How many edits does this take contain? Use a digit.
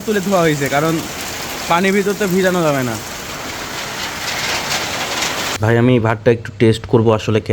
1